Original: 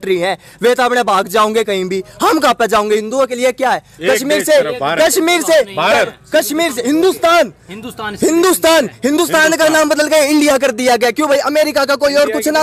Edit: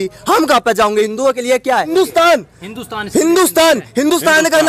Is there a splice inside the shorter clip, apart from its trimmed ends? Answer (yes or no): yes